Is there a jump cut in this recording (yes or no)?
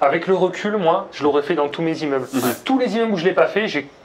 no